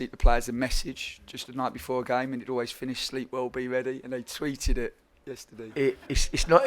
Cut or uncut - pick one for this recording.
cut